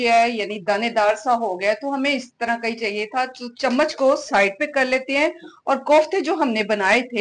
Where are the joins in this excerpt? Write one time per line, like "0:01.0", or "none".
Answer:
none